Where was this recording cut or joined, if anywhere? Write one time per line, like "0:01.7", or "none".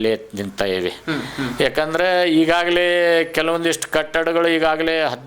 none